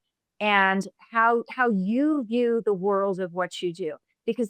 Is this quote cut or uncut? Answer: uncut